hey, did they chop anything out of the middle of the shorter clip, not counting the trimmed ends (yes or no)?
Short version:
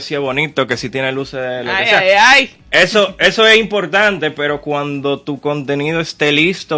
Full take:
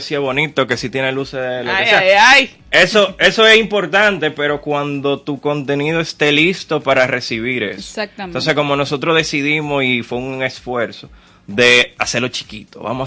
no